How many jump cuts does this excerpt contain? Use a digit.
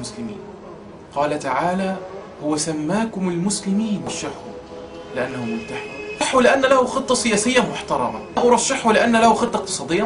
1